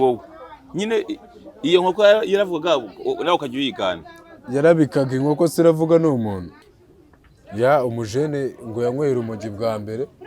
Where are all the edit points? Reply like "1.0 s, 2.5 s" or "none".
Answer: 6.5 s